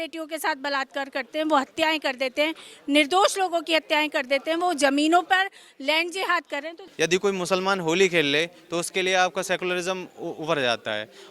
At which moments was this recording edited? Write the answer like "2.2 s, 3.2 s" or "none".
6.8 s